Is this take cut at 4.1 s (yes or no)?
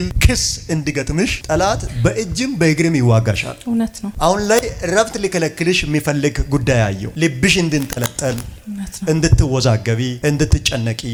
no